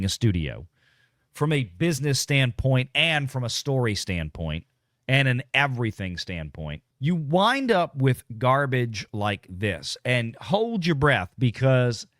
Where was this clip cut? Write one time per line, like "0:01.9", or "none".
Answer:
0:06.8